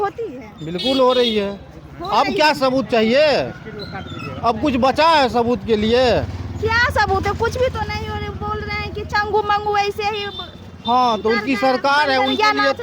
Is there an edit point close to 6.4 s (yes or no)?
no